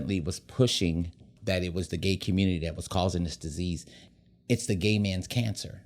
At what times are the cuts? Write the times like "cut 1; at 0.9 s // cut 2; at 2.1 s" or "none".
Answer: cut 1; at 1.3 s // cut 2; at 4.0 s